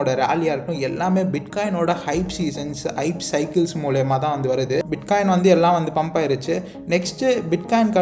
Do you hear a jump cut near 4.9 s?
yes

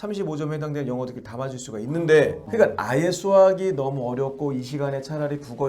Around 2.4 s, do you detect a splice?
yes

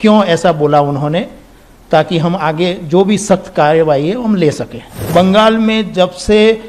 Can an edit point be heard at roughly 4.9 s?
yes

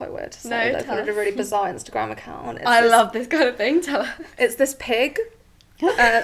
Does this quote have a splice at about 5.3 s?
no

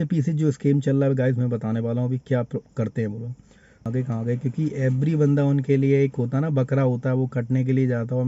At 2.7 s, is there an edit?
no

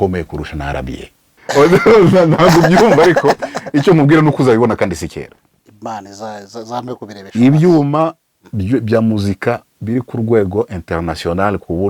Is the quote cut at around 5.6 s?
no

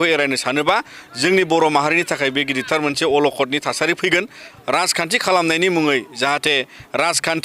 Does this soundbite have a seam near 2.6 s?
no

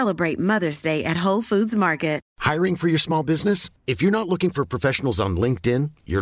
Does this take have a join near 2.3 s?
yes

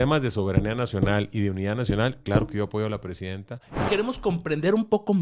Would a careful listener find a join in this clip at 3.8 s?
yes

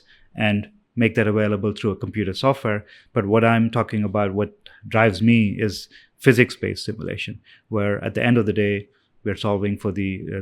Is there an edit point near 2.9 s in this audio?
yes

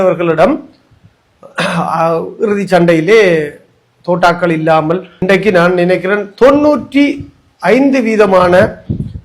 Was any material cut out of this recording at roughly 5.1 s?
yes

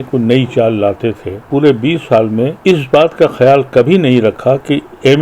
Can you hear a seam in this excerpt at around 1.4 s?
yes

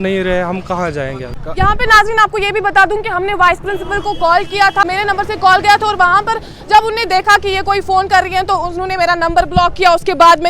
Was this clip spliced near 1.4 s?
yes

